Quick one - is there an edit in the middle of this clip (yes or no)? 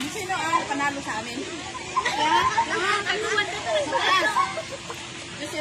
no